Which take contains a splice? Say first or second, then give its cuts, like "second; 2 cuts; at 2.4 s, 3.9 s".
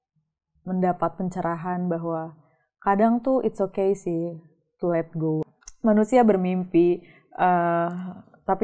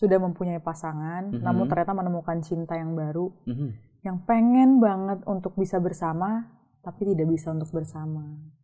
first; 1 cut; at 5.5 s